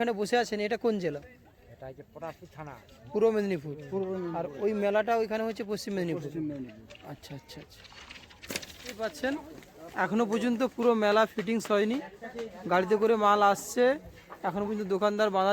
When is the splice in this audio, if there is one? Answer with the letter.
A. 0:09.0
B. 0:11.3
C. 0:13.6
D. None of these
A